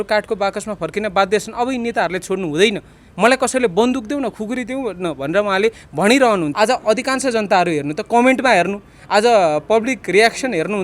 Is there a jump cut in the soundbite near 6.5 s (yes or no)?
yes